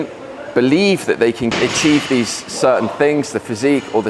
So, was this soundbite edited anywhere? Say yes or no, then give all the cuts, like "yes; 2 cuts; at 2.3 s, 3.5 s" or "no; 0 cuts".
yes; 1 cut; at 1.5 s